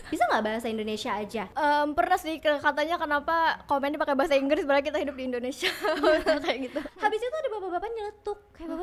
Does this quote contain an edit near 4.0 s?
no; 2 cuts; at 1.5 s, 6.9 s

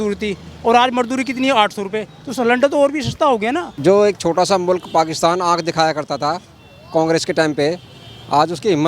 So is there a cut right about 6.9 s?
no; 1 cut; at 3.7 s

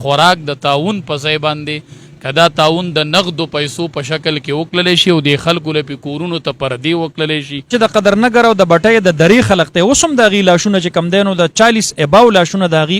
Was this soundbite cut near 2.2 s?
no; 1 cut; at 7.7 s

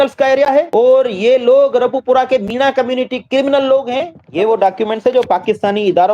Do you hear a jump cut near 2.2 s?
no; 1 cut; at 4.2 s

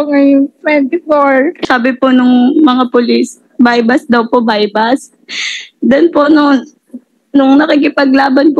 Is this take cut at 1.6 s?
yes; 1 cut; at 1.6 s

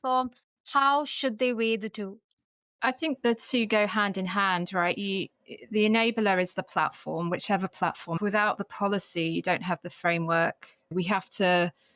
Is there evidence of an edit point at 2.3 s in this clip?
no; 2 cuts; at 8.2 s, 10.9 s

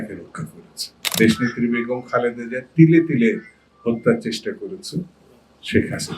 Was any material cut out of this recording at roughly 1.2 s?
yes; 1 cut; at 1.2 s

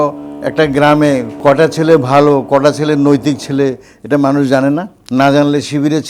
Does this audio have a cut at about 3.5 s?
no; 2 cuts; at 1.3 s, 5.0 s

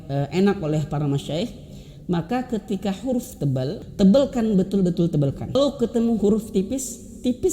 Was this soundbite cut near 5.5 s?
yes; 2 cuts; at 3.8 s, 5.5 s

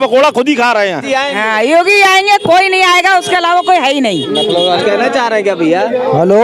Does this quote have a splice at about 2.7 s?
no; 2 cuts; at 1.1 s, 4.8 s

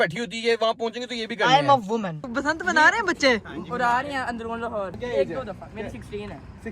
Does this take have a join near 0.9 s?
no; 2 cuts; at 2.3 s, 5.0 s

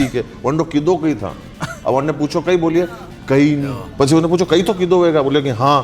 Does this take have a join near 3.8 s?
yes; 1 cut; at 3.8 s

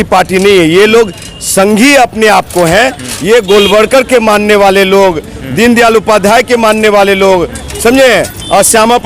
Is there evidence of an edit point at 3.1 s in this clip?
no; 0 cuts

